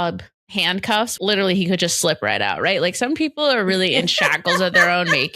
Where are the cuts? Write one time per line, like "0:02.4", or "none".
0:01.1